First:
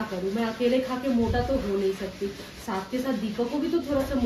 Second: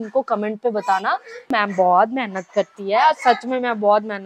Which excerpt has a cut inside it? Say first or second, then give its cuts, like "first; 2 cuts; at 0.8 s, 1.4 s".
second; 1 cut; at 1.5 s